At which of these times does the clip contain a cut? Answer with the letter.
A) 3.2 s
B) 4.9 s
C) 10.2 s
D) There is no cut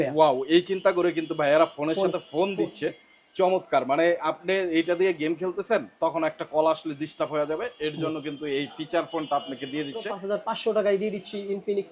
C